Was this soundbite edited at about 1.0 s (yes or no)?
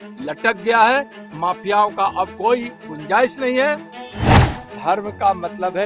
no